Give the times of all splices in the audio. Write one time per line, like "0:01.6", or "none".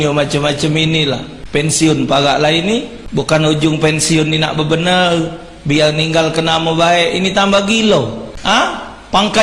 0:01.3
0:03.0
0:08.3